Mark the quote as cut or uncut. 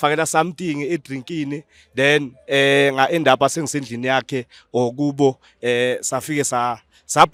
uncut